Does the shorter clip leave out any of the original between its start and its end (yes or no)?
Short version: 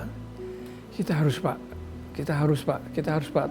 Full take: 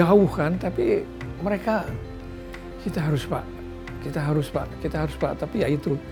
no